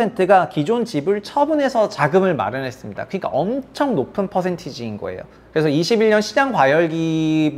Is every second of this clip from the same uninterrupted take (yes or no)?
yes